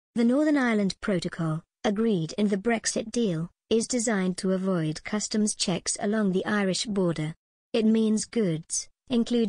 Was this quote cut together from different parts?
yes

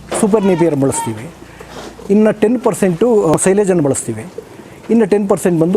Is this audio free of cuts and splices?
no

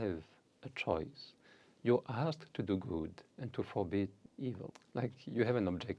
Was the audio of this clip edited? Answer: yes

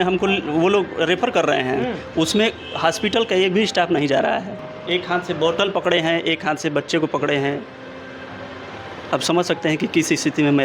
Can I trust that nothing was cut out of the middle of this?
no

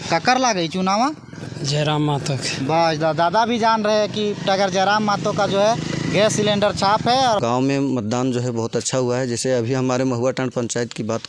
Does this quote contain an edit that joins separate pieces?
yes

